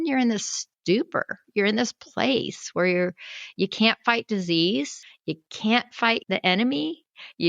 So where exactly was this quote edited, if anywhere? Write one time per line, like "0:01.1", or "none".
none